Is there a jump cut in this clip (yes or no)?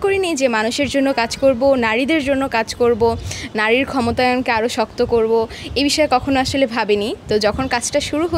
no